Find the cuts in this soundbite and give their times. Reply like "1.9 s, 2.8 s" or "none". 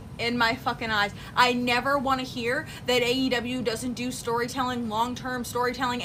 none

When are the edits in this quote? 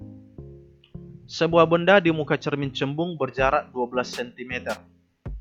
1.4 s

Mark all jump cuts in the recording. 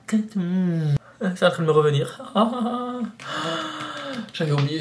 1.0 s

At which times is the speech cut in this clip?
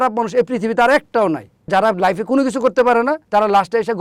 1.7 s, 3.2 s

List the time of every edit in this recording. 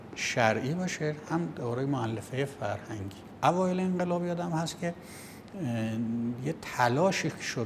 3.2 s

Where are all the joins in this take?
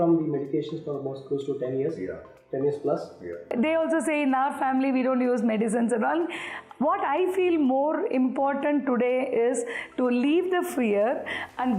3.5 s

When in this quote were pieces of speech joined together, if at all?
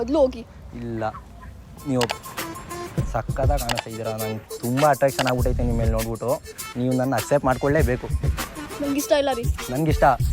2.1 s

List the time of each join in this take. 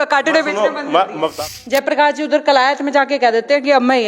1.4 s

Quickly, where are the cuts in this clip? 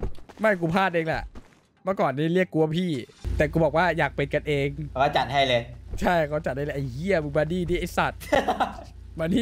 3.2 s, 4.8 s

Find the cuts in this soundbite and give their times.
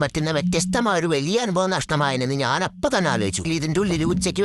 3.4 s

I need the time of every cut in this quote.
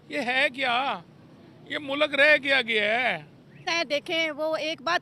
3.7 s

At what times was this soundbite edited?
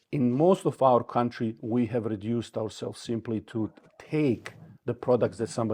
none

